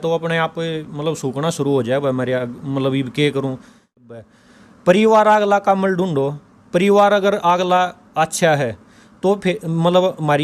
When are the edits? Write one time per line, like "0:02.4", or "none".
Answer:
0:04.0